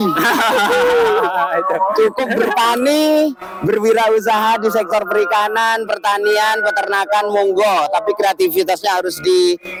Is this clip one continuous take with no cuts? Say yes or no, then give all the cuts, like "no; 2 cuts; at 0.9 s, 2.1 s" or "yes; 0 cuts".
yes; 0 cuts